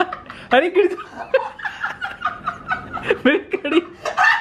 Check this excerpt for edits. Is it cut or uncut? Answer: uncut